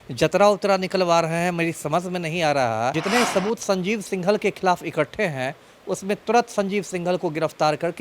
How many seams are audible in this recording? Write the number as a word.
one